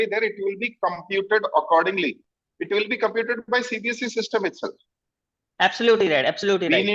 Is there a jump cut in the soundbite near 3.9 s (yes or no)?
no